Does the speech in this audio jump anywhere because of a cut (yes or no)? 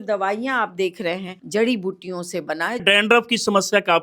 yes